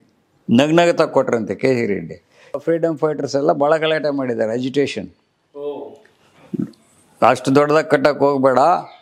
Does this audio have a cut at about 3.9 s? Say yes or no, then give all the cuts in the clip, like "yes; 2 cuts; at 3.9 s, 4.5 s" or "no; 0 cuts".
no; 1 cut; at 2.6 s